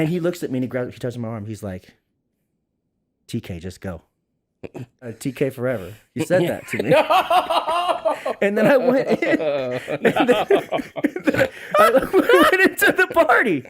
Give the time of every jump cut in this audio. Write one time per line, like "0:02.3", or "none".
0:05.1

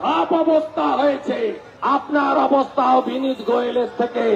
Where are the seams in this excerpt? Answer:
0:01.7

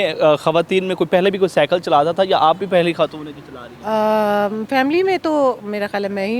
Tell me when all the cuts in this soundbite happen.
none

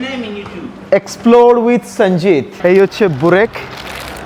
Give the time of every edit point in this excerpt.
0:02.5

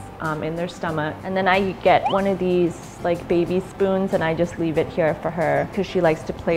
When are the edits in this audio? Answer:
0:01.1

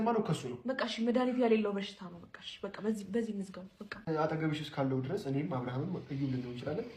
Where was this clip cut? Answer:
0:04.0

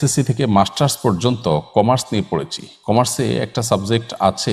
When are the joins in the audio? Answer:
none

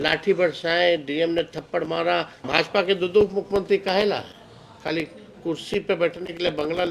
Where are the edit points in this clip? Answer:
0:02.4

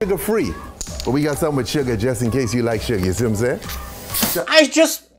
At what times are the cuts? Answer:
none

